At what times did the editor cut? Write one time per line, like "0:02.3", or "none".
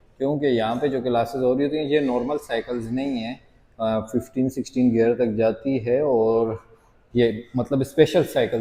none